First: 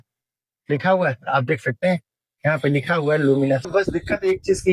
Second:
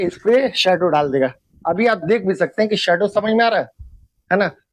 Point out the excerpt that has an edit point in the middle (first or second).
first